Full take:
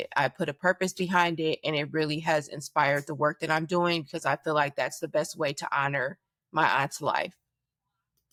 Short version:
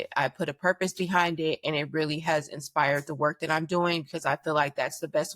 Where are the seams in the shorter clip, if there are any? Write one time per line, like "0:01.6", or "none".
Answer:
none

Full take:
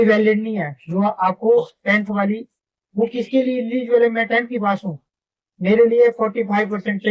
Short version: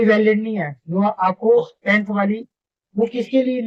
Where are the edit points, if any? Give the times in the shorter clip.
none

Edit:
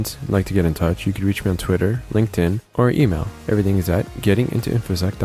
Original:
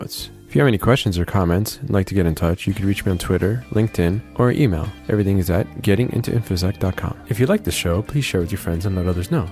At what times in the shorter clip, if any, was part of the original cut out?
none

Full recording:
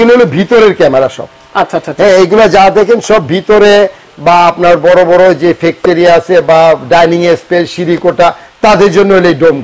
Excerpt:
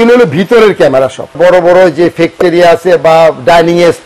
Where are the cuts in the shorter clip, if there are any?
0:01.4

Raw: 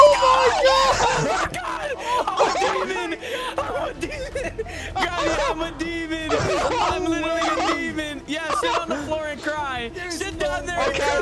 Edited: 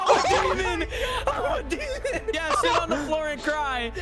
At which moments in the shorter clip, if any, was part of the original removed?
0:02.4

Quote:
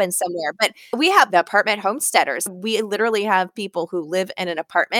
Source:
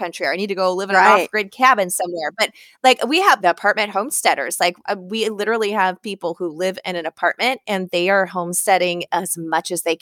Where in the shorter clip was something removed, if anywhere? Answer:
0:00.9
0:02.5

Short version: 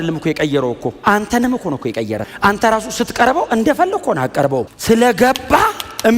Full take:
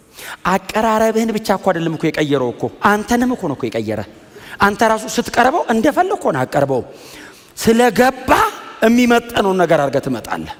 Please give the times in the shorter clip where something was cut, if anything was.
0:02.3
0:04.7

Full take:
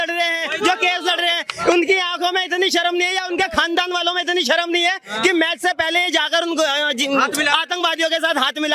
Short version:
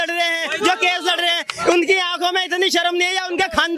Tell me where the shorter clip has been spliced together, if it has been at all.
none

